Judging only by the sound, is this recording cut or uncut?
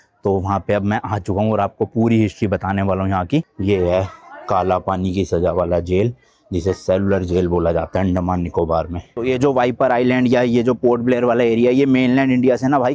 cut